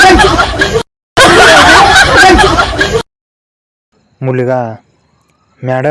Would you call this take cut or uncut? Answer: uncut